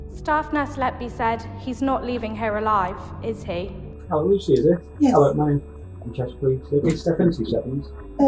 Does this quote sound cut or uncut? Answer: cut